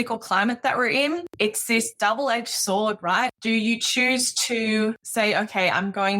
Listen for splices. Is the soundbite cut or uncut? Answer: cut